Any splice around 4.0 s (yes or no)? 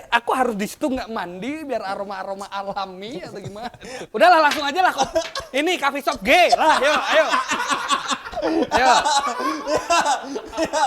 yes